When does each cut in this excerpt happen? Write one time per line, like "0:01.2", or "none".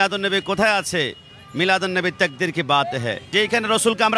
0:03.3